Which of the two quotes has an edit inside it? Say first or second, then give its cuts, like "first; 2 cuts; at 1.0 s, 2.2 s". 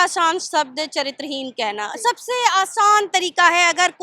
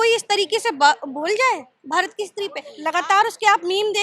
second; 1 cut; at 2.7 s